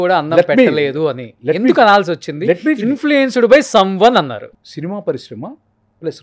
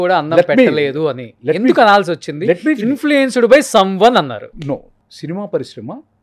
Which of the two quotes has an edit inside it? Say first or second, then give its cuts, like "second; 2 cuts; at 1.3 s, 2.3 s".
first; 1 cut; at 4.5 s